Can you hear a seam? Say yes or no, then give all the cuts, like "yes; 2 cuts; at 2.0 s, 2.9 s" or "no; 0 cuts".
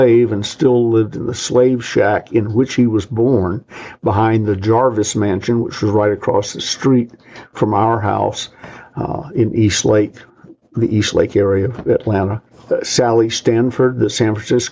no; 0 cuts